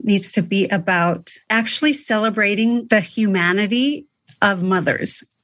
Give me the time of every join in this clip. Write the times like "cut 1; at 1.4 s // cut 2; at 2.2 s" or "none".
cut 1; at 1.4 s // cut 2; at 2.8 s